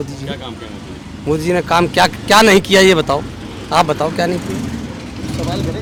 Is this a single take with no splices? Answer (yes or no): yes